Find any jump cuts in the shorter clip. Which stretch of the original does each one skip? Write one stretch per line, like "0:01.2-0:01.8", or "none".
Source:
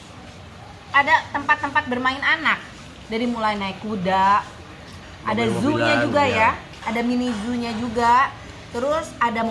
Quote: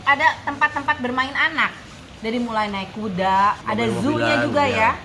0:04.5-0:05.2